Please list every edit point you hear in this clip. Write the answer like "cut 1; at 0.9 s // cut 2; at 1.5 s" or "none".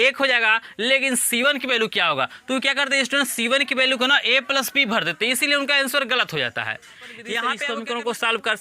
cut 1; at 7.6 s

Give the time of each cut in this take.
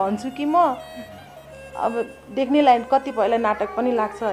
none

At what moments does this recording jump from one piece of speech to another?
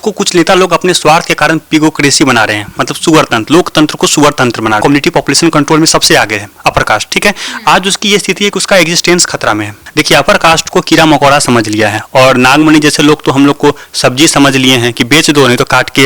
cut 1; at 4.8 s // cut 2; at 9.8 s

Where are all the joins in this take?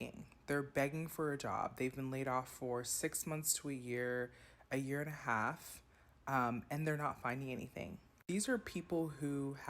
cut 1; at 8.2 s

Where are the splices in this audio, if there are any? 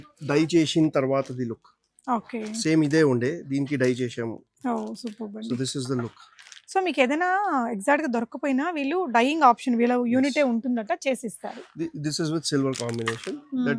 none

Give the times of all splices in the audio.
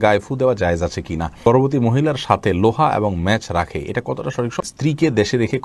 cut 1; at 1.4 s // cut 2; at 4.6 s

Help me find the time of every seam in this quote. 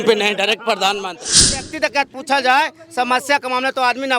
cut 1; at 1.7 s

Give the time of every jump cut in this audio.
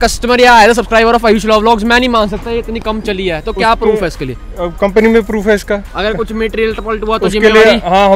none

